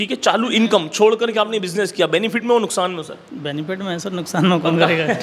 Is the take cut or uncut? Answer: uncut